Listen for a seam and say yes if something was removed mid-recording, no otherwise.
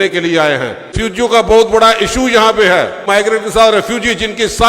yes